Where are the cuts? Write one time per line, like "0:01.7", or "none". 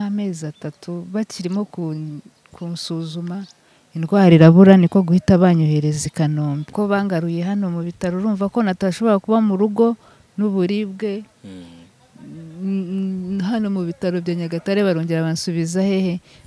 0:06.6